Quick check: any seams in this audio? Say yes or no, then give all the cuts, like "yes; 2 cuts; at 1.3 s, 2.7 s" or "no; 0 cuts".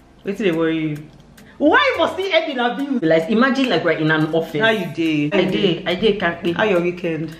yes; 2 cuts; at 3.0 s, 5.1 s